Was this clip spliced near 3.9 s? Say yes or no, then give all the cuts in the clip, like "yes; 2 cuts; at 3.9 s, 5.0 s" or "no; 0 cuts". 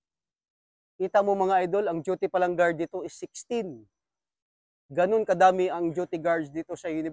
no; 0 cuts